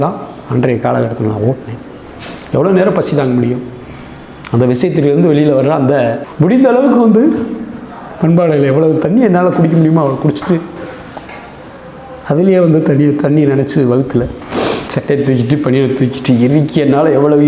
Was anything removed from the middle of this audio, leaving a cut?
yes; 1 cut; at 6.3 s

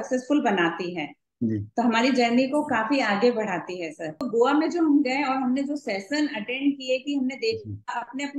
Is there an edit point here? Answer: yes; 1 cut; at 4.2 s

